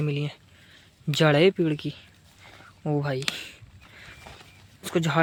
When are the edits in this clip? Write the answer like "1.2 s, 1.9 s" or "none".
none